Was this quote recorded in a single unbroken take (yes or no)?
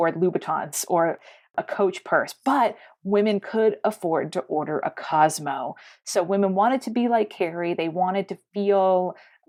yes